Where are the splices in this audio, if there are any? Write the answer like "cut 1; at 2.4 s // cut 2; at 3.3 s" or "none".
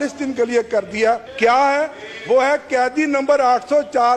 cut 1; at 1.3 s